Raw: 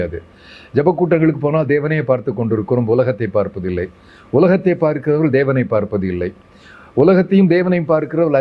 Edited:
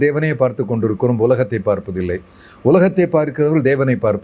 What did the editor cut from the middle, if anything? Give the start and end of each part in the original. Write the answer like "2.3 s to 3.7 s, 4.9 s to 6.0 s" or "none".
none